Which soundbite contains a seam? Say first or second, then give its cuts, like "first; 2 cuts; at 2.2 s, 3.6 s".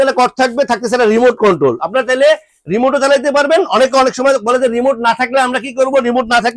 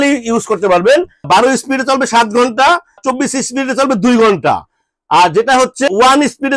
second; 1 cut; at 1.2 s